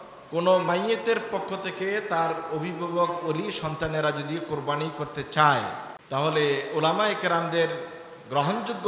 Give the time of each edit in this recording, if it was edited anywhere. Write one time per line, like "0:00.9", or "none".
0:05.9